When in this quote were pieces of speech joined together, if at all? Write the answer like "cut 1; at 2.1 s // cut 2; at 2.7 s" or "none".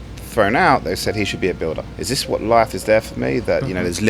cut 1; at 1.9 s